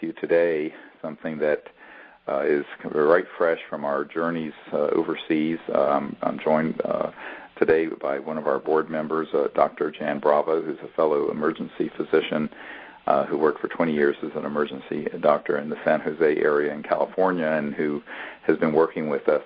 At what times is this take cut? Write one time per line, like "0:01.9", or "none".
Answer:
none